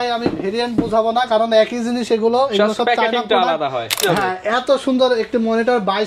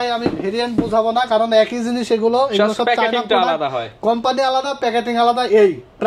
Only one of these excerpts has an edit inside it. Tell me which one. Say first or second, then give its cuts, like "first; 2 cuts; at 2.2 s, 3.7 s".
first; 1 cut; at 4.0 s